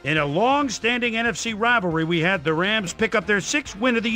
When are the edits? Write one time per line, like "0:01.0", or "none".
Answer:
0:02.5